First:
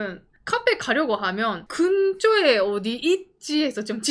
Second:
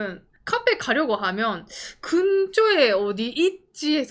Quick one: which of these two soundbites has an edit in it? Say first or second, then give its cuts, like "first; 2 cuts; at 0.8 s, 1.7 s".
first; 1 cut; at 1.6 s